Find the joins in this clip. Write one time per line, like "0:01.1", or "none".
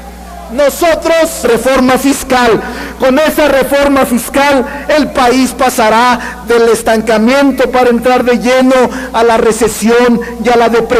none